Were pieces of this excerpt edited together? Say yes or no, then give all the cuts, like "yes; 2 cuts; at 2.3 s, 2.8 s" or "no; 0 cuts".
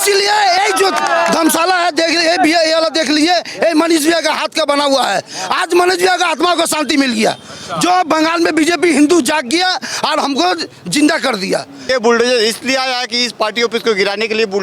yes; 1 cut; at 11.8 s